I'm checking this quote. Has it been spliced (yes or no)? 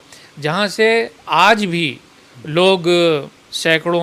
no